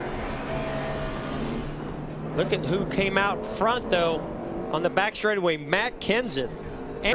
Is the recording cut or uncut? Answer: uncut